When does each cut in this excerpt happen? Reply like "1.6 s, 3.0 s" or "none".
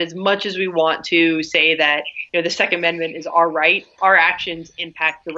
2.1 s, 4.0 s